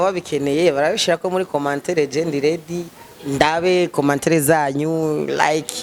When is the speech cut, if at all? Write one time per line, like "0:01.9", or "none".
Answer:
none